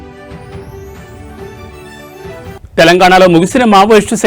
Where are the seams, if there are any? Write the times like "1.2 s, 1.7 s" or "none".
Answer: 0.9 s, 2.5 s